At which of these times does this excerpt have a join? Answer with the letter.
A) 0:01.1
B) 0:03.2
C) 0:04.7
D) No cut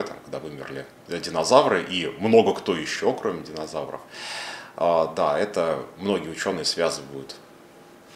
D